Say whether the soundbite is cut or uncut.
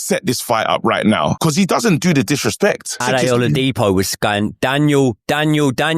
cut